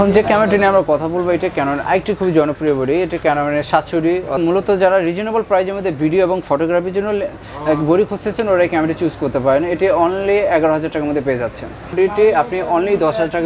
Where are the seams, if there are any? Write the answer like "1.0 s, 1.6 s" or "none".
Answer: 4.3 s, 11.9 s